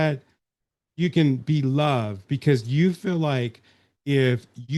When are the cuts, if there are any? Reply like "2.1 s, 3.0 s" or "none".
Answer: none